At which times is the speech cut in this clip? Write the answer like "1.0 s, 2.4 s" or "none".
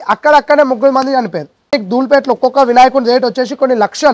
1.7 s